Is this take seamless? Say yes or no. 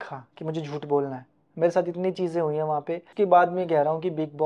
no